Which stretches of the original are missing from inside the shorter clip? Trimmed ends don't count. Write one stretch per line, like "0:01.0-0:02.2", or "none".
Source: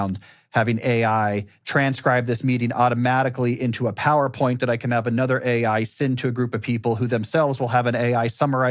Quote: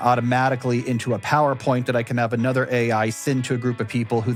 none